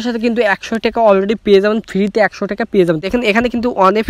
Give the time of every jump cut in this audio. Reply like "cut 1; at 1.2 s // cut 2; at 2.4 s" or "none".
cut 1; at 3.0 s